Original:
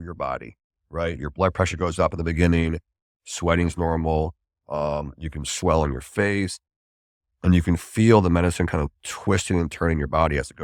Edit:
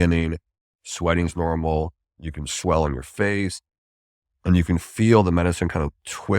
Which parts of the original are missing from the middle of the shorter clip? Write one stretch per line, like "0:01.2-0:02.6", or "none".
0:04.6-0:05.1